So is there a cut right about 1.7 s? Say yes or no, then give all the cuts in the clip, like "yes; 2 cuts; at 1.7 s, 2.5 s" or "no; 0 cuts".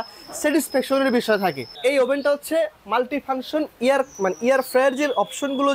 yes; 1 cut; at 1.7 s